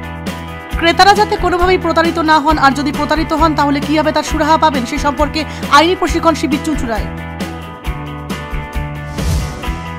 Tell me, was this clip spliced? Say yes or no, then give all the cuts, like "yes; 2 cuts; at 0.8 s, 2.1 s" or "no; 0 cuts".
no; 0 cuts